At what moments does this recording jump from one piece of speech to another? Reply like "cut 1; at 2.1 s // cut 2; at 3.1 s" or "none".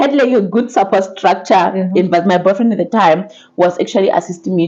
none